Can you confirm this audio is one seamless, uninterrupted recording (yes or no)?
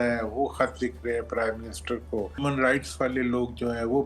no